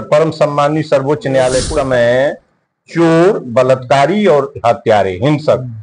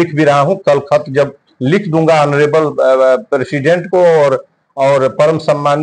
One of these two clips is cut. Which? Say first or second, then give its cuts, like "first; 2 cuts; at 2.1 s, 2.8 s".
first; 1 cut; at 1.7 s